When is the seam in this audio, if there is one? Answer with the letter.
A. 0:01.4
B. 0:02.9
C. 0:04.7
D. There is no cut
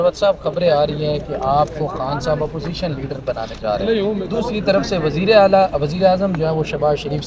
D